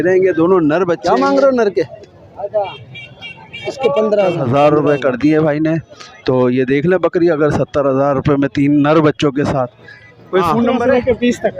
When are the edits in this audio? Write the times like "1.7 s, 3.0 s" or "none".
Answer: 1.0 s, 4.4 s, 10.8 s